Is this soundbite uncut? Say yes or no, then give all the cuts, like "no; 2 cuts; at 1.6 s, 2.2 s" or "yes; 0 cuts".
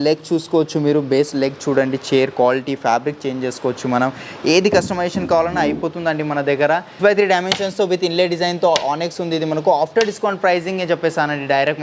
yes; 0 cuts